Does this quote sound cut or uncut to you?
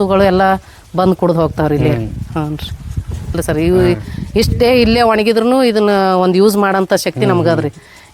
cut